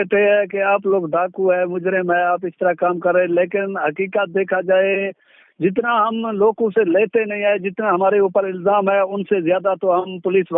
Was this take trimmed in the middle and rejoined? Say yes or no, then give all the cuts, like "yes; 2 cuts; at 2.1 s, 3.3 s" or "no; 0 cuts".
no; 0 cuts